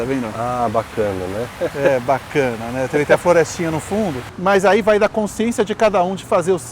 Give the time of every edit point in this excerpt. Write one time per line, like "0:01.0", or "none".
0:04.2